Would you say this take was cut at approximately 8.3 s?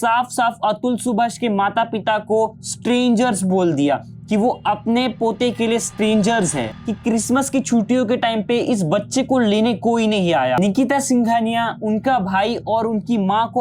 no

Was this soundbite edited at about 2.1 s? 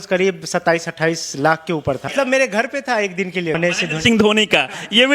yes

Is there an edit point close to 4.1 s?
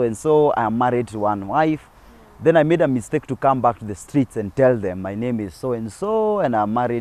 no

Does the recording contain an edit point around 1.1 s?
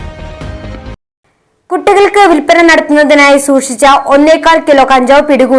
yes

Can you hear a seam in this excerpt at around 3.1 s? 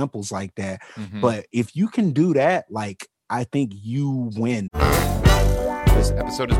no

